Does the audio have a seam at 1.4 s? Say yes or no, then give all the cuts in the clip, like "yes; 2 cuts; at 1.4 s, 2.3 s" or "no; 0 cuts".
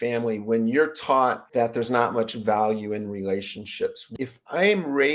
yes; 2 cuts; at 1.4 s, 4.0 s